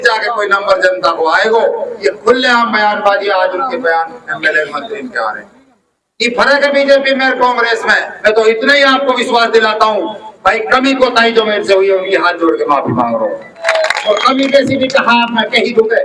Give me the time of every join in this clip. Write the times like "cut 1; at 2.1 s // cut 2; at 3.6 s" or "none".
cut 1; at 8.1 s // cut 2; at 13.6 s